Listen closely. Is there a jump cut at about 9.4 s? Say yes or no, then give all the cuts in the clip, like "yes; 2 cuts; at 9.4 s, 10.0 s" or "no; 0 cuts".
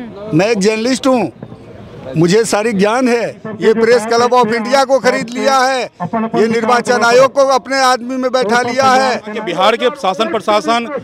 yes; 2 cuts; at 3.4 s, 9.4 s